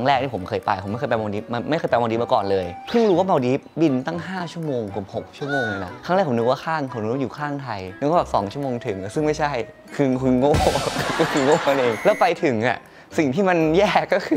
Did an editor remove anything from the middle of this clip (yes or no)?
no